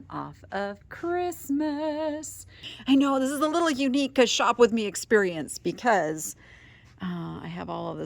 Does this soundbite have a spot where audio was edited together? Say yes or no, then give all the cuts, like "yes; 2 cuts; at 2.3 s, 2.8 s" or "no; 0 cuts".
yes; 1 cut; at 2.7 s